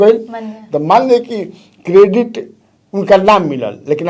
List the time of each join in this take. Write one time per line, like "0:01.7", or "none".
none